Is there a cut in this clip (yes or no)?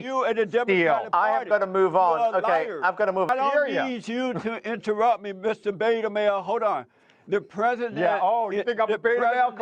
yes